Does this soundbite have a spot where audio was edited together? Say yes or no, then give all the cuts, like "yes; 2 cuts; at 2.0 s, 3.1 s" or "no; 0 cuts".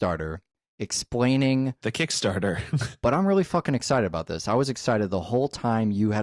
no; 0 cuts